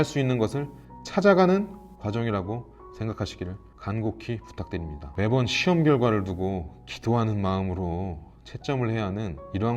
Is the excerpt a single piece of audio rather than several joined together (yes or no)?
no